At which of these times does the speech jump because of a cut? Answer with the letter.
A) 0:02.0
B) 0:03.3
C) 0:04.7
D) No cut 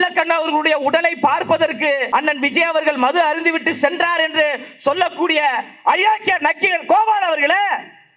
A